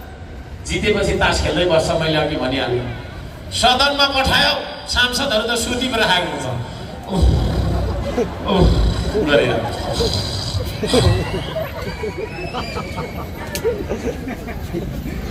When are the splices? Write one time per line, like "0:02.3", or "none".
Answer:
none